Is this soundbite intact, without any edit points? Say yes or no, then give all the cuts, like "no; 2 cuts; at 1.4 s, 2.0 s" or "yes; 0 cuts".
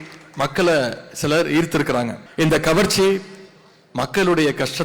no; 1 cut; at 2.2 s